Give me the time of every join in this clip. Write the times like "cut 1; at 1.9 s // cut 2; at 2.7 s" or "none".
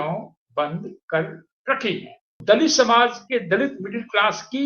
cut 1; at 2.4 s